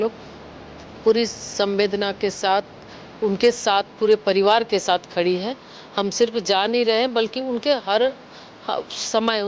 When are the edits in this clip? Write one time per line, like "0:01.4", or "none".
none